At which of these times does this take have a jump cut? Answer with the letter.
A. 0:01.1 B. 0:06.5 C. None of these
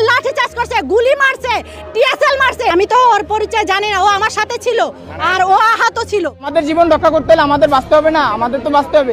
B